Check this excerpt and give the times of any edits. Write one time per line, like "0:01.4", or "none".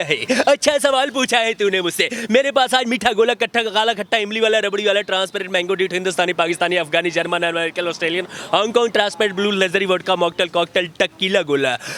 none